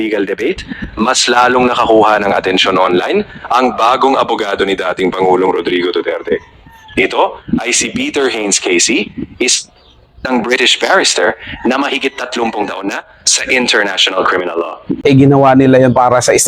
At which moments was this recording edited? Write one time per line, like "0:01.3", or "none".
0:14.8